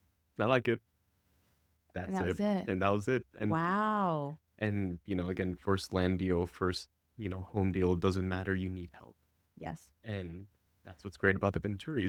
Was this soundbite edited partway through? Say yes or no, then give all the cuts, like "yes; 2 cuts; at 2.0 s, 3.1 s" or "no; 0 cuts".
no; 0 cuts